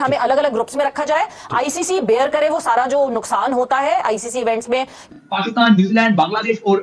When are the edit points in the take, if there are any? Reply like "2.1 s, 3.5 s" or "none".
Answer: 5.1 s